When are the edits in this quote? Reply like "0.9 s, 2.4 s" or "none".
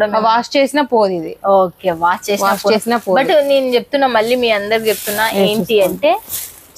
none